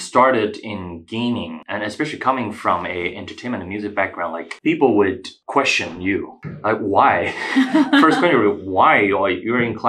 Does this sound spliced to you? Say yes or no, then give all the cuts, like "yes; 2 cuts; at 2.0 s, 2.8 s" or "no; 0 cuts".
yes; 4 cuts; at 1.6 s, 4.5 s, 5.3 s, 6.4 s